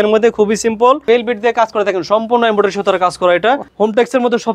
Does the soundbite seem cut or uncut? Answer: cut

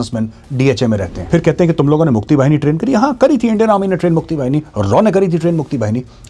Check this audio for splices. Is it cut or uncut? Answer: cut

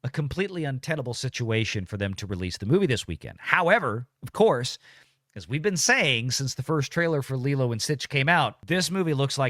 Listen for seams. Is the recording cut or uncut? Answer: cut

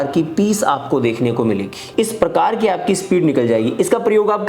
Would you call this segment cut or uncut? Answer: cut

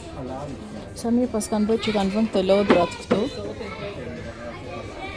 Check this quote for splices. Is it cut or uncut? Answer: uncut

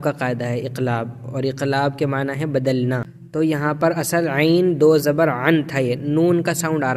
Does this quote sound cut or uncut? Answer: cut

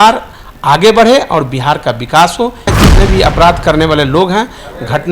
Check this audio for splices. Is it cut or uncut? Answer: cut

